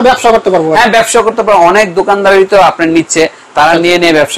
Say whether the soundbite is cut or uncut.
uncut